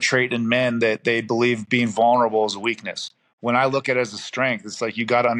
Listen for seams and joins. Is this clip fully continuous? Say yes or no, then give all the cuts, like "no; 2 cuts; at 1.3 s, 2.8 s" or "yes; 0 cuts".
yes; 0 cuts